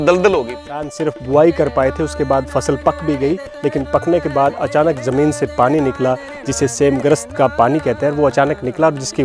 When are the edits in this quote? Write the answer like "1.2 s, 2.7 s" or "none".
0.9 s